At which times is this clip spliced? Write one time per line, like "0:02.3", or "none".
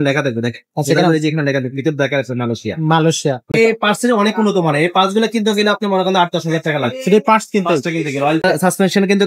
0:03.5
0:08.4